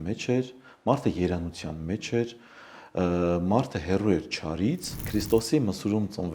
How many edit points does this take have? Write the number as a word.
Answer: one